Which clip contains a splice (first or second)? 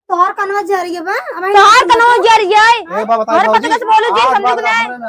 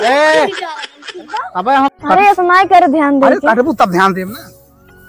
second